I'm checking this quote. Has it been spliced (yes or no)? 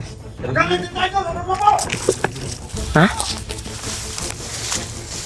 no